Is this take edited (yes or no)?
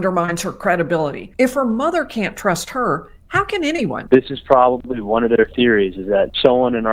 yes